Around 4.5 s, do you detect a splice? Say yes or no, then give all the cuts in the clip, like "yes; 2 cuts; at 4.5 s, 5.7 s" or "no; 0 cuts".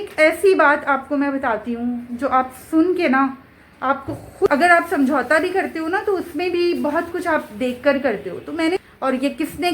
yes; 2 cuts; at 4.5 s, 8.8 s